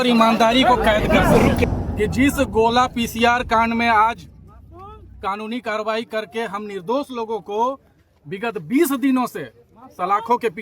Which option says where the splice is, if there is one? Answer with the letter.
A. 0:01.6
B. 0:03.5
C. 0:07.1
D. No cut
A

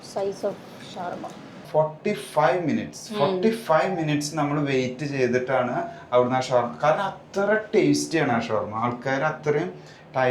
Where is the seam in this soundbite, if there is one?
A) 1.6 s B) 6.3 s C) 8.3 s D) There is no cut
A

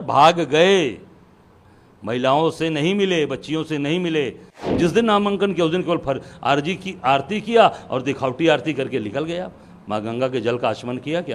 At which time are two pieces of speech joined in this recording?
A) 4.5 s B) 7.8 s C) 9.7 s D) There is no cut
A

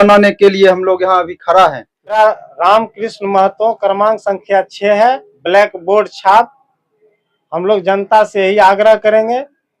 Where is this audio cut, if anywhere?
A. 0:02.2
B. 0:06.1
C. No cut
A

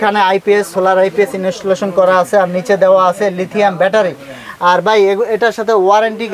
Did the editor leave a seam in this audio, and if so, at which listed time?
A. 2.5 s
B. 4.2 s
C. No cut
C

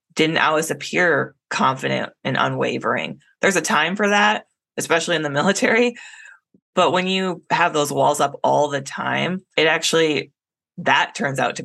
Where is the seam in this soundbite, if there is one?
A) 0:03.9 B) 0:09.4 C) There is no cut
B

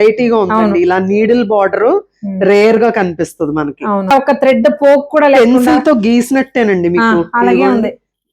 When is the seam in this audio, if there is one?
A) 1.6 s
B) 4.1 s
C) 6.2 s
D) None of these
B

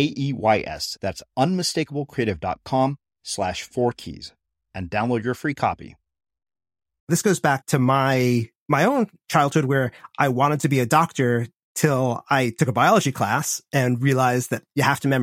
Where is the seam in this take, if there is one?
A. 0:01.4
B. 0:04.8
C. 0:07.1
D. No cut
C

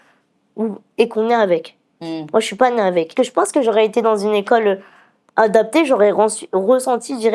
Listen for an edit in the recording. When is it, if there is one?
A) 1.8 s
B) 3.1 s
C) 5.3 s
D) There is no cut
B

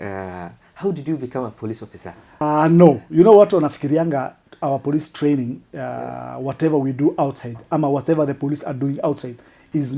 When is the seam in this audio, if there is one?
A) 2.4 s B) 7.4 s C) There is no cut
A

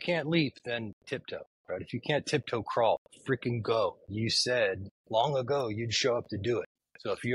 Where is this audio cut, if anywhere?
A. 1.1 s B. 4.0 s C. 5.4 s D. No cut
B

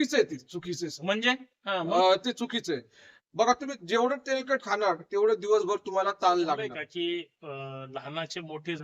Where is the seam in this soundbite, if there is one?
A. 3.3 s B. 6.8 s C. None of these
B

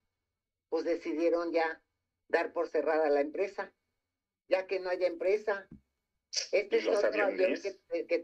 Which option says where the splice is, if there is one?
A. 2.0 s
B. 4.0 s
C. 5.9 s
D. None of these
D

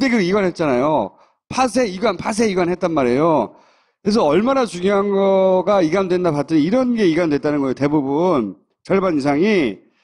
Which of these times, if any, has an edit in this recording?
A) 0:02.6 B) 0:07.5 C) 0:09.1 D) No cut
D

